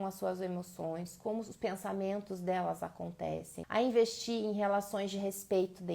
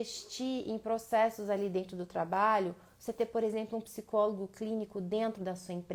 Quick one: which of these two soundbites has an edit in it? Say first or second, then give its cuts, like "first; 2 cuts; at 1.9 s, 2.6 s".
first; 1 cut; at 3.5 s